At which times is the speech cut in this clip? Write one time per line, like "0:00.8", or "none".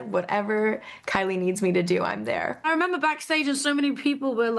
0:02.6